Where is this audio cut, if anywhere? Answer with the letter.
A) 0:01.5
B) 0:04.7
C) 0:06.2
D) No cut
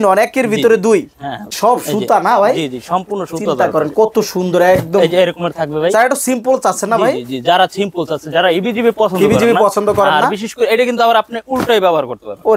A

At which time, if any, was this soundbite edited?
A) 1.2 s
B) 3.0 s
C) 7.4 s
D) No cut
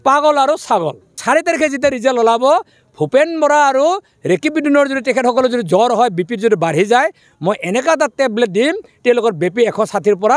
A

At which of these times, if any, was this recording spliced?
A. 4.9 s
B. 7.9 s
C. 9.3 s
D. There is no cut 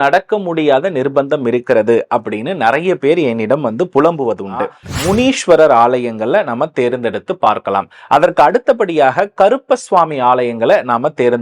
A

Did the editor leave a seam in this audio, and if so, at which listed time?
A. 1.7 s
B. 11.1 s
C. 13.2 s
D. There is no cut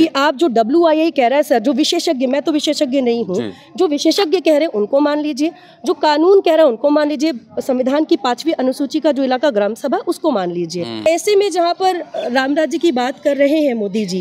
B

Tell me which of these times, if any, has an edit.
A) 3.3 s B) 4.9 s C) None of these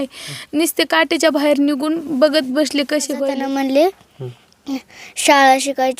A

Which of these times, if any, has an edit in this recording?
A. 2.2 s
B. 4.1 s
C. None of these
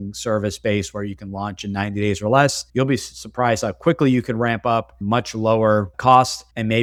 C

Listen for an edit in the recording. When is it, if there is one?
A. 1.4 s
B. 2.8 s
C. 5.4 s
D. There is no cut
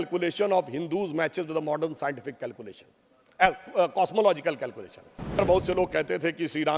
C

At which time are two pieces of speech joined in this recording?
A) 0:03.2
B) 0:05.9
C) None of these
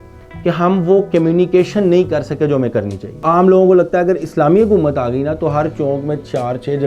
A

